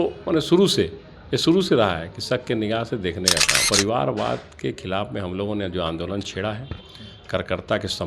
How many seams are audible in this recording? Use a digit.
1